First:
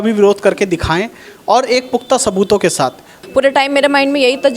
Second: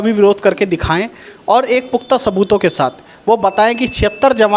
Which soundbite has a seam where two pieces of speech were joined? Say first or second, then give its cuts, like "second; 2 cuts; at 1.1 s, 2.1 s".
first; 1 cut; at 3.1 s